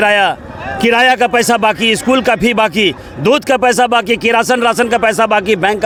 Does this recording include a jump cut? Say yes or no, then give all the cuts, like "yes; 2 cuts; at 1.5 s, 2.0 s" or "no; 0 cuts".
no; 0 cuts